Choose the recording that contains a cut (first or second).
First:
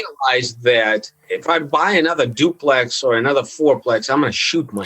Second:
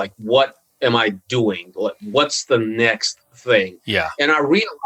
first